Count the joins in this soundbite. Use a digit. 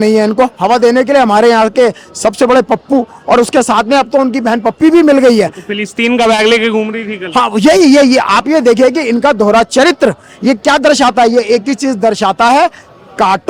0